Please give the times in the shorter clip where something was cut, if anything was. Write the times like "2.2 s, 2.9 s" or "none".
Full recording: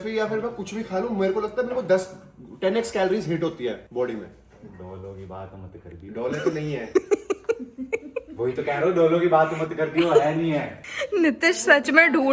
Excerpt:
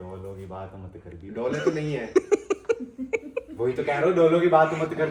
none